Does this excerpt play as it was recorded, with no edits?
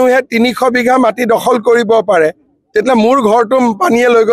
yes; 0 cuts

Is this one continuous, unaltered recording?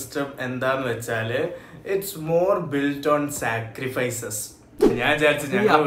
no; 1 cut; at 4.9 s

